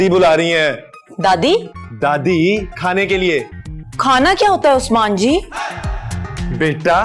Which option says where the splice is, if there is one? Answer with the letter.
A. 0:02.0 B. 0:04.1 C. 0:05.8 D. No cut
D